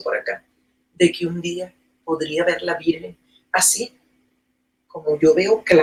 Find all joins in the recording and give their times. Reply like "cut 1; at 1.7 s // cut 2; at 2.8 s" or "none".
none